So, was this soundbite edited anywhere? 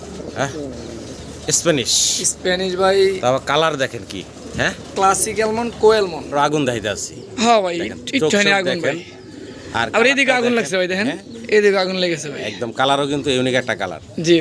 yes; 1 cut; at 6.2 s

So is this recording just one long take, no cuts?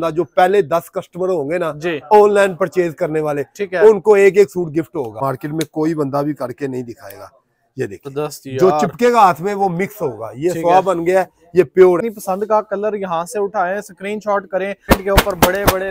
no; 4 cuts; at 5.2 s, 8.1 s, 12.1 s, 14.9 s

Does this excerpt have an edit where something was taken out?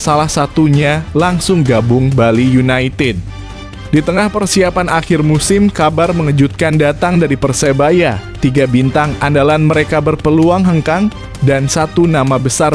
no; 0 cuts

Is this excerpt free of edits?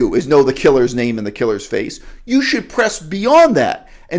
yes; 0 cuts

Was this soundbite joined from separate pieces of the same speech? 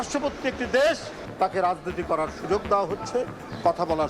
yes; 1 cut; at 1.2 s

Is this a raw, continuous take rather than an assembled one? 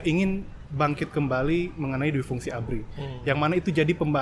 yes; 0 cuts

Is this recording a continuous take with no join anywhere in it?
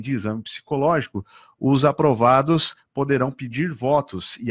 yes; 0 cuts

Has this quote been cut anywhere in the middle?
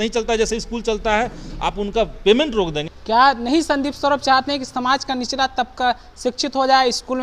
yes; 1 cut; at 2.9 s

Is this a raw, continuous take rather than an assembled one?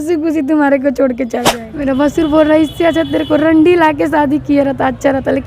no; 1 cut; at 1.5 s

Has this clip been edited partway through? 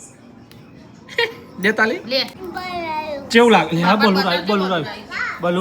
yes; 1 cut; at 2.4 s

